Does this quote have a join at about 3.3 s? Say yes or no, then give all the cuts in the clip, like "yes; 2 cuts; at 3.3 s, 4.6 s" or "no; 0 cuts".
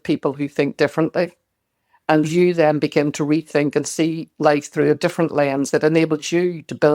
no; 1 cut; at 5.7 s